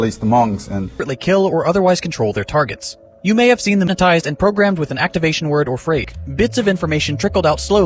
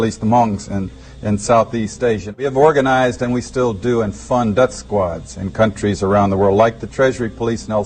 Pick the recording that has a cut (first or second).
first